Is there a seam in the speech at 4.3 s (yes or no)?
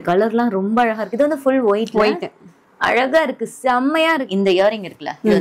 yes